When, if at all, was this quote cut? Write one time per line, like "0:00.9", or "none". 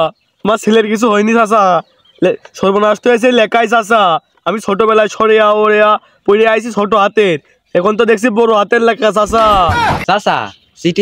0:10.0